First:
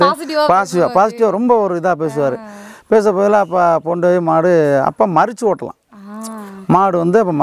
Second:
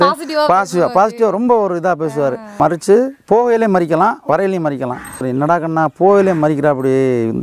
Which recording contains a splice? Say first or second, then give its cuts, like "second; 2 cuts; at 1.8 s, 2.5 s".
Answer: second; 2 cuts; at 2.5 s, 5.2 s